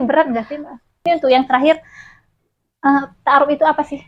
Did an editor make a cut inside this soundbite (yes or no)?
yes